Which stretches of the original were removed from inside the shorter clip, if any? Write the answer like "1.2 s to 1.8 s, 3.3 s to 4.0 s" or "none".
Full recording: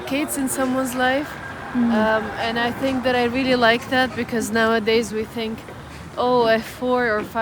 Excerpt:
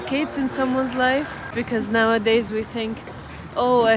1.6 s to 4.2 s